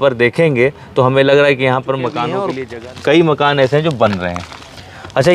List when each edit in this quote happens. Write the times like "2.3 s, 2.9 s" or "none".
2.5 s